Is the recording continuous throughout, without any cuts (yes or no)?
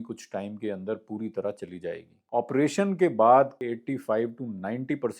no